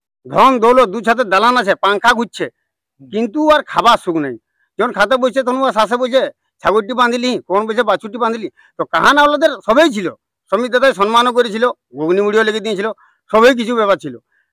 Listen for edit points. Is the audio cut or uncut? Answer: uncut